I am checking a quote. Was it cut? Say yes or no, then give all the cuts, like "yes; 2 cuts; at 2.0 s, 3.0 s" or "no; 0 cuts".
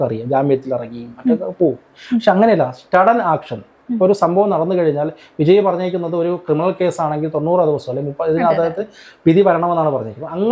no; 0 cuts